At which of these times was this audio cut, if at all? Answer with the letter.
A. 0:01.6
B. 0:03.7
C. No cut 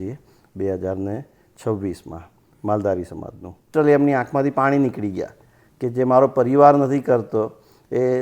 B